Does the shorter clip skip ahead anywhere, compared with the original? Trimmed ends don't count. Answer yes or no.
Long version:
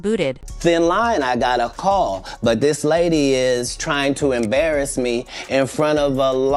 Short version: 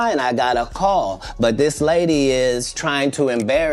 no